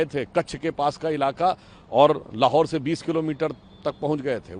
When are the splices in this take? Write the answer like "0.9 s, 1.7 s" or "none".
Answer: none

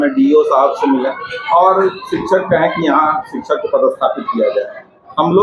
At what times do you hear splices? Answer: none

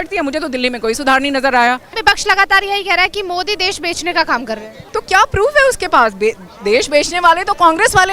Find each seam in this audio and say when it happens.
1.9 s, 4.8 s

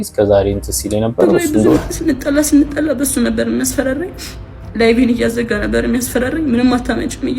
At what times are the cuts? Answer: 1.8 s

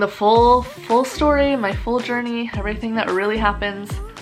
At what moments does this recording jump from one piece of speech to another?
none

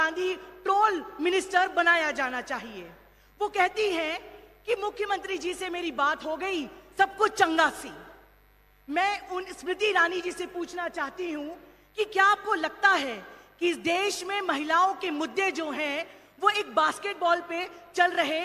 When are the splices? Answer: none

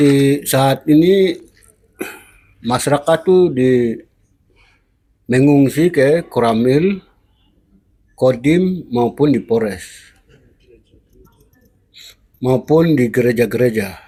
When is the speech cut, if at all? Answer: none

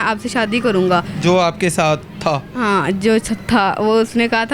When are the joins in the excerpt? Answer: none

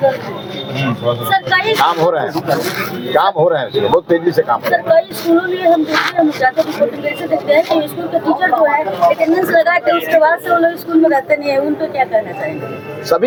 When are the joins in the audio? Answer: none

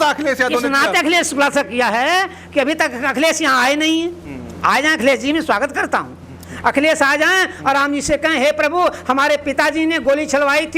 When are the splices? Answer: none

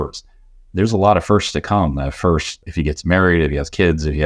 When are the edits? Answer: 2.6 s

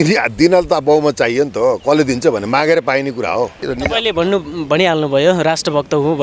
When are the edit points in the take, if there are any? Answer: 3.7 s

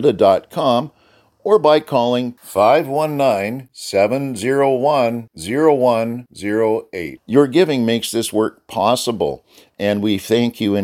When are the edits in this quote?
none

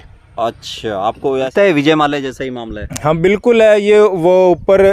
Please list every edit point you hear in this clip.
1.5 s

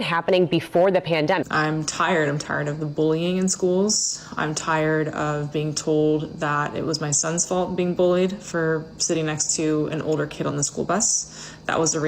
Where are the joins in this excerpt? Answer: 1.5 s

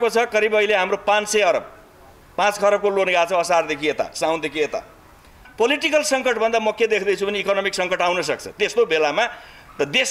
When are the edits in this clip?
5.4 s

